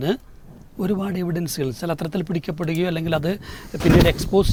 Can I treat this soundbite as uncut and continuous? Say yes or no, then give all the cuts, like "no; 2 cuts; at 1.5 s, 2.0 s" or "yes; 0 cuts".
yes; 0 cuts